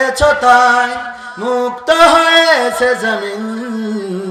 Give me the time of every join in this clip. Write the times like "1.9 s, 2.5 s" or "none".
none